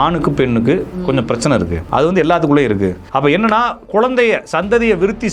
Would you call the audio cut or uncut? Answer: cut